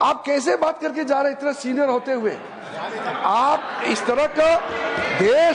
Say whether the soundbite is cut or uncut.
uncut